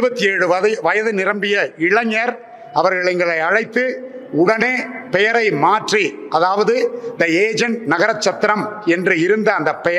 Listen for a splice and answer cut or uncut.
uncut